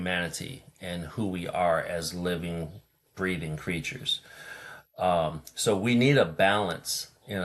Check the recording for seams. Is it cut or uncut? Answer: uncut